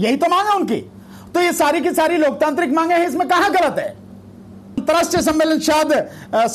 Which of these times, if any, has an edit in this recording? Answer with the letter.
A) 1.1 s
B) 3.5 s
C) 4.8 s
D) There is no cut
C